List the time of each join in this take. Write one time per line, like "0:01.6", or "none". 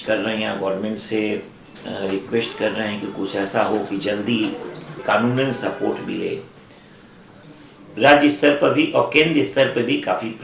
0:05.0
0:07.3